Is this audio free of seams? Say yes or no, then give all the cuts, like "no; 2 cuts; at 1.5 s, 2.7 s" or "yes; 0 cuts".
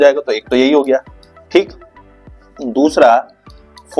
yes; 0 cuts